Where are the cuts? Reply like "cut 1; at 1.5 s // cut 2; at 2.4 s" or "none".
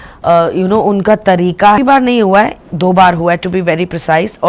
cut 1; at 1.8 s